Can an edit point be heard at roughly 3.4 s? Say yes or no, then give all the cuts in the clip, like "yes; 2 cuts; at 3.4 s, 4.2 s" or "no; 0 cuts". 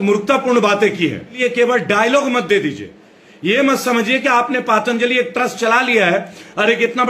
no; 1 cut; at 1.4 s